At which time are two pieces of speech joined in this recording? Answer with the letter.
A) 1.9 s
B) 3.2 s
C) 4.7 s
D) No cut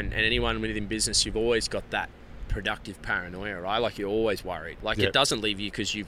C